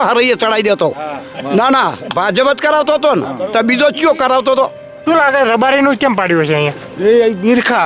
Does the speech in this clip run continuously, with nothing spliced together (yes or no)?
no